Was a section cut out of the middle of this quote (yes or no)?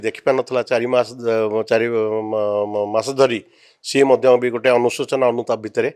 no